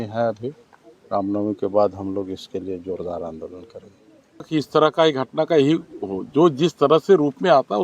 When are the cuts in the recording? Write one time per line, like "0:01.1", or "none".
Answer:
0:04.4